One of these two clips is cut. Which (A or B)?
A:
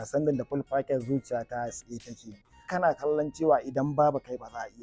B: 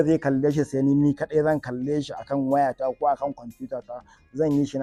A